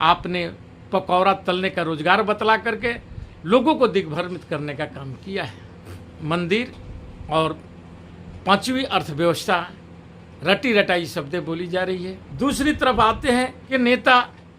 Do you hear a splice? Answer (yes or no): yes